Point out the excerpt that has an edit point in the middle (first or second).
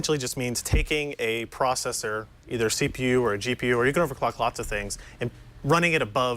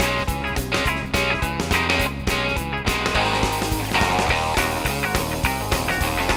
first